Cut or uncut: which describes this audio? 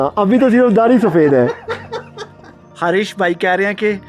cut